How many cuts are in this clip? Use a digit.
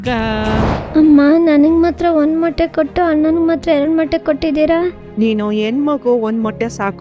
2